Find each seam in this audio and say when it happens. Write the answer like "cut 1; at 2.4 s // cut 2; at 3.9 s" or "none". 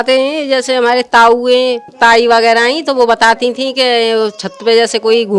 cut 1; at 1.9 s